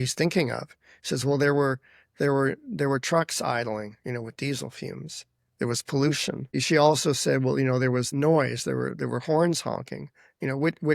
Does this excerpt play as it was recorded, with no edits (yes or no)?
no